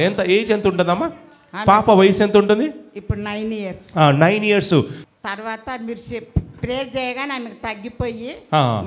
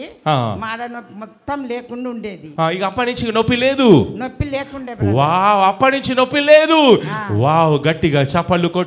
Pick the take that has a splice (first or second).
first